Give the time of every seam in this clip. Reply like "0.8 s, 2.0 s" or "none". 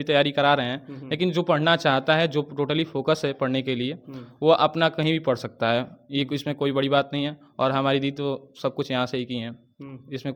none